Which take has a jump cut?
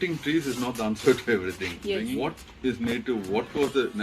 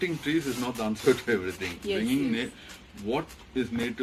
first; 1 cut; at 2.1 s

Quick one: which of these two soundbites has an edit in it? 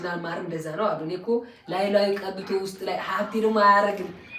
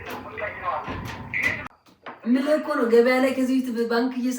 second; 1 cut; at 1.7 s

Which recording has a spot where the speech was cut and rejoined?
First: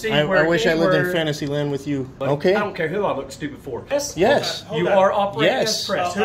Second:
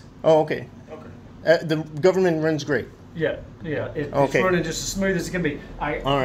first; 2 cuts; at 2.1 s, 3.9 s

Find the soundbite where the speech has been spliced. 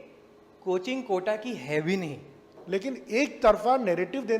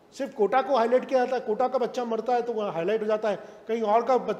first; 1 cut; at 2.5 s

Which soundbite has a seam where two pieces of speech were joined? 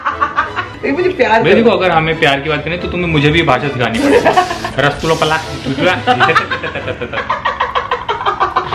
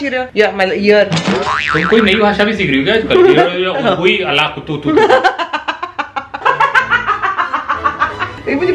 second; 1 cut; at 6.4 s

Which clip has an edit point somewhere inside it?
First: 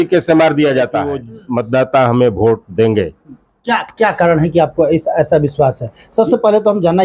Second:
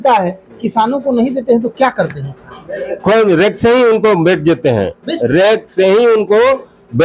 first; 1 cut; at 1.3 s

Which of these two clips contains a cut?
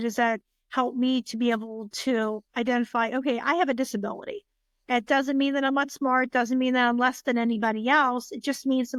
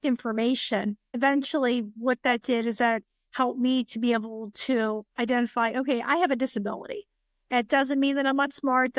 second; 1 cut; at 1.1 s

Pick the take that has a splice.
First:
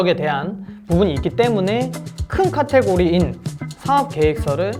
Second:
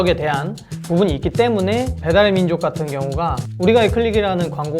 second; 2 cuts; at 2.0 s, 3.4 s

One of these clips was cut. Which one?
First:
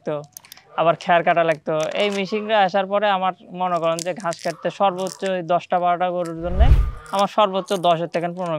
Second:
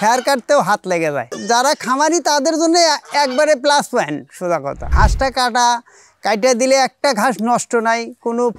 second; 2 cuts; at 1.3 s, 4.9 s

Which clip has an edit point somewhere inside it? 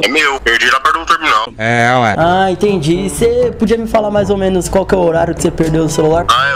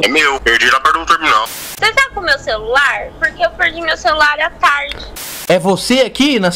second; 2 cuts; at 1.7 s, 5.1 s

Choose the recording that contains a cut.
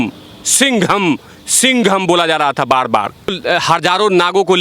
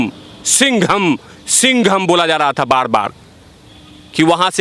first; 1 cut; at 3.4 s

